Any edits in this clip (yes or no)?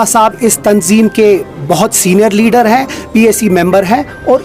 no